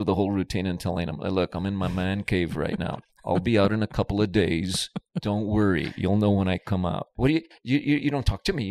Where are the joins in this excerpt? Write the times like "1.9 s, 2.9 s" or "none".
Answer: 7.1 s